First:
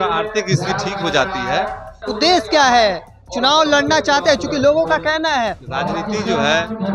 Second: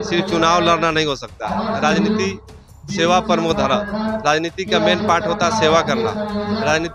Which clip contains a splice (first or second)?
first